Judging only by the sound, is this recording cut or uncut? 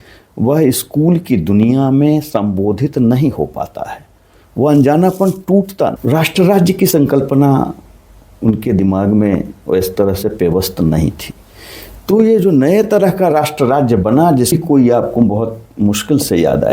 cut